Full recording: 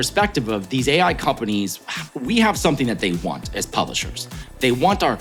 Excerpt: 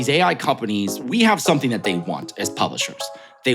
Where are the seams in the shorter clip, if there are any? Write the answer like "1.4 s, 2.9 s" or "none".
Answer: 1.0 s